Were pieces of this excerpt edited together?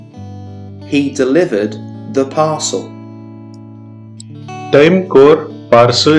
no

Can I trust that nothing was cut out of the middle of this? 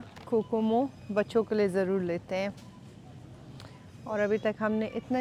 yes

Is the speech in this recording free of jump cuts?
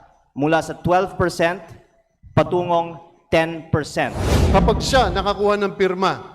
no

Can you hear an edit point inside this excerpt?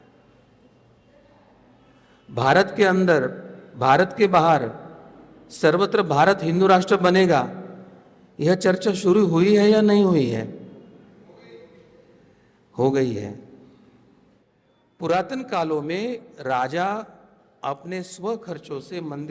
yes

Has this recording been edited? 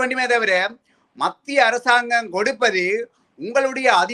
no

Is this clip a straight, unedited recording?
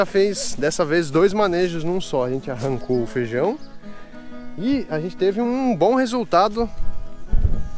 yes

